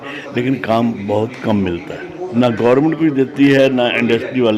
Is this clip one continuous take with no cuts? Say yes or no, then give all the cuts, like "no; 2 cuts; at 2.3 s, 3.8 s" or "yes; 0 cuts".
no; 1 cut; at 2.2 s